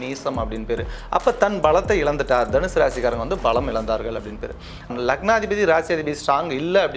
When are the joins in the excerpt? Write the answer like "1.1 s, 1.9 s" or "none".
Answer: 4.9 s

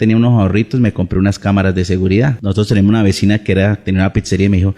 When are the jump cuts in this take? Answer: none

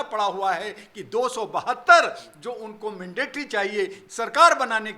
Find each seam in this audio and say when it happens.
4.0 s

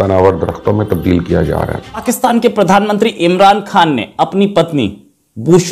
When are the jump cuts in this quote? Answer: 2.0 s

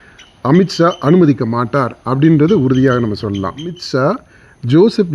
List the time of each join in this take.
3.8 s

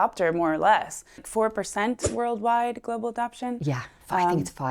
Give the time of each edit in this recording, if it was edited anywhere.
1.3 s

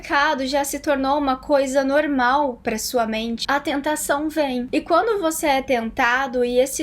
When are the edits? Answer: 3.4 s, 4.7 s

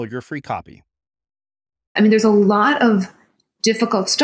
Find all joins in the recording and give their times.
1.9 s

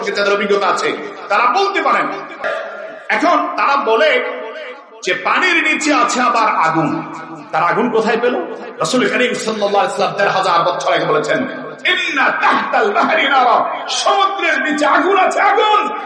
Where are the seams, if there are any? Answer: 2.5 s

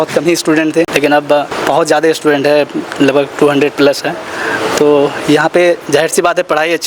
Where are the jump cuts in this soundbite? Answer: 1.1 s

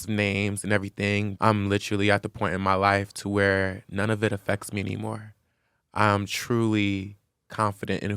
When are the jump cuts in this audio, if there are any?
1.3 s

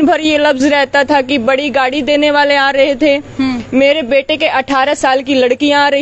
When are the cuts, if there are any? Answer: none

